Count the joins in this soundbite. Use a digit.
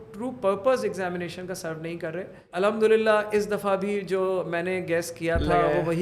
1